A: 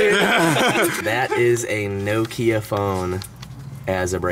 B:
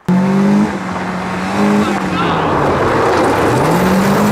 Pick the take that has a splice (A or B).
A